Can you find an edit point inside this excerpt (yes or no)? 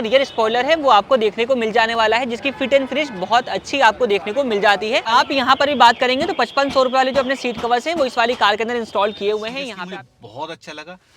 yes